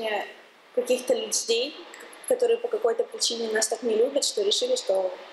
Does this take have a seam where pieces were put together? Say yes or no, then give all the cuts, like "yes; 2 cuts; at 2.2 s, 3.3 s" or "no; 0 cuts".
no; 0 cuts